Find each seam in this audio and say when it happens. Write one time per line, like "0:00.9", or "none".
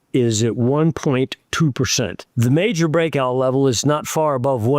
0:02.2